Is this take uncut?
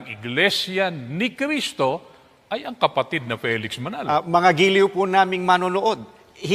no; 1 cut; at 4.0 s

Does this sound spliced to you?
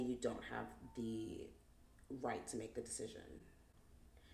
no; 0 cuts

